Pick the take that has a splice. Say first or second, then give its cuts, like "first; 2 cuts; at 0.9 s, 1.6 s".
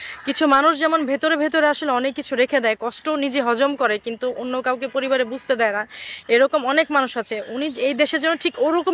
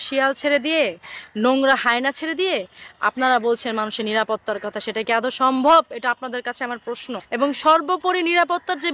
second; 1 cut; at 7.2 s